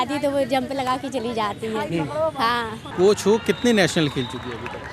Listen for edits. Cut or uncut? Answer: cut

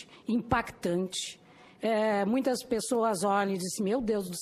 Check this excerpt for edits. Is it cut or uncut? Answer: uncut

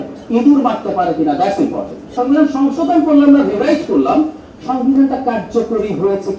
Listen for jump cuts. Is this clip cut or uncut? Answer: cut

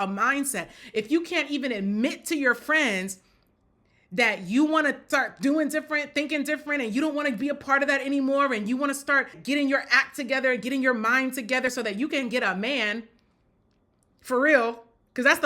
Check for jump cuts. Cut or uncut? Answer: cut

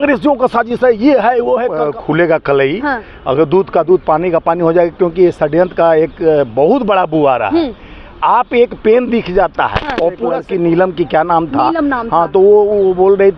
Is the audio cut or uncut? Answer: cut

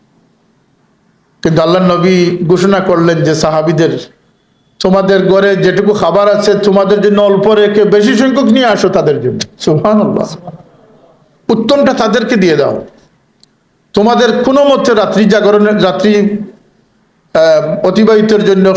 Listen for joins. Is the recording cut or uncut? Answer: uncut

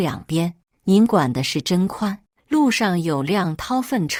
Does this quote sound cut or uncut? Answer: uncut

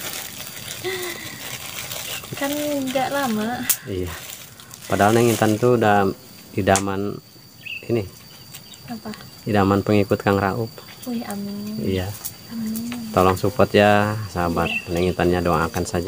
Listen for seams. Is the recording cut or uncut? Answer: uncut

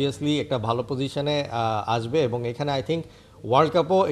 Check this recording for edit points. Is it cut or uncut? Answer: uncut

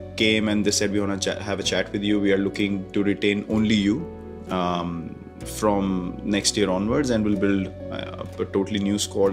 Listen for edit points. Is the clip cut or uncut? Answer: uncut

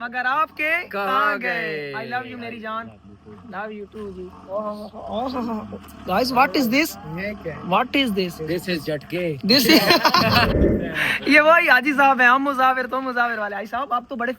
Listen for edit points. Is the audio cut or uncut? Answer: cut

